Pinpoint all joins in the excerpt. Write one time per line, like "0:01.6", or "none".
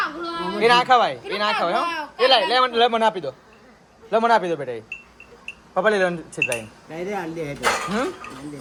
none